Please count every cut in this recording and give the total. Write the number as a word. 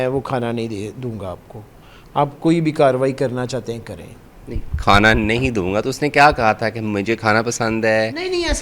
zero